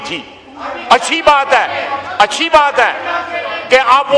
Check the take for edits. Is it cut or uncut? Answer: uncut